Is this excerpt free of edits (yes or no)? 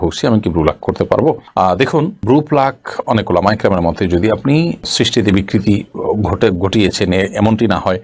yes